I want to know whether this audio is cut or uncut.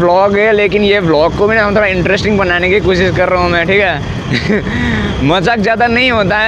uncut